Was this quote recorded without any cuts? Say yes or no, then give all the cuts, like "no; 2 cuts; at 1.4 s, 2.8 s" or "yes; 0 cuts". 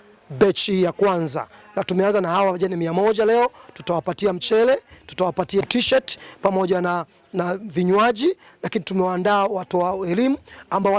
no; 1 cut; at 5.6 s